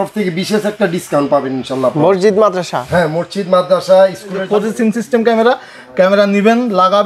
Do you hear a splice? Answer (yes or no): yes